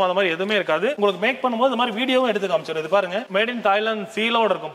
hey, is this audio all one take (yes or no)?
yes